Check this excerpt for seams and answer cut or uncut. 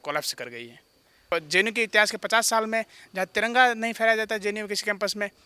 cut